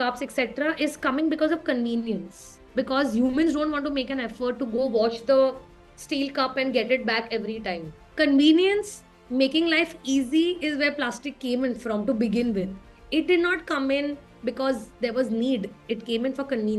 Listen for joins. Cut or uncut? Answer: uncut